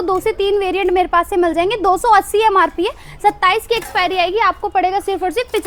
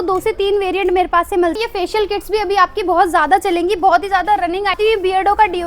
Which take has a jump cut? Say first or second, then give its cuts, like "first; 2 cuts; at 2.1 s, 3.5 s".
second; 2 cuts; at 1.5 s, 4.8 s